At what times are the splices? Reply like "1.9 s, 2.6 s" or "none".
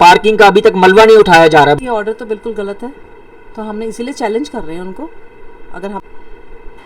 1.8 s, 6.0 s